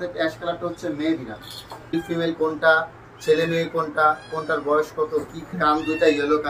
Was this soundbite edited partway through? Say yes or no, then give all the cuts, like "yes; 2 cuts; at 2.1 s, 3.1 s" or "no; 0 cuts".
yes; 2 cuts; at 1.9 s, 5.5 s